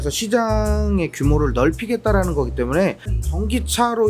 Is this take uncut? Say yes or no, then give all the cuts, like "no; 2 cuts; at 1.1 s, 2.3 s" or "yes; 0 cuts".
no; 1 cut; at 3.1 s